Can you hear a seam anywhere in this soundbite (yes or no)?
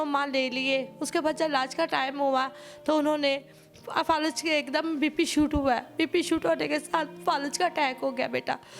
no